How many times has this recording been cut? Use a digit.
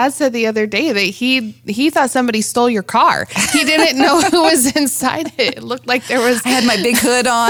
0